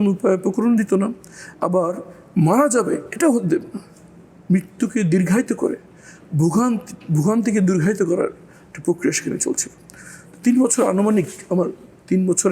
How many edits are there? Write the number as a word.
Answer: zero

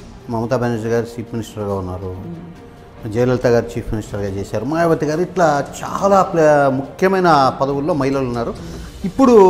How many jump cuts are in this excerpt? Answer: zero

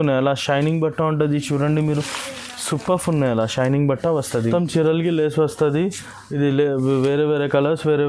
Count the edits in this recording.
one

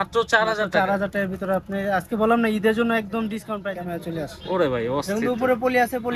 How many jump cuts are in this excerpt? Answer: one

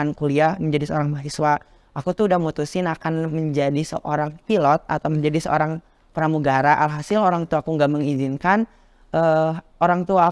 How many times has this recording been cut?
one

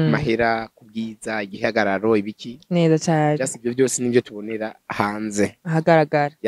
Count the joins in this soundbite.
zero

